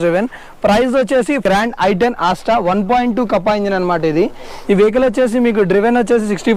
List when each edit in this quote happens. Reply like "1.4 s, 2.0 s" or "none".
1.4 s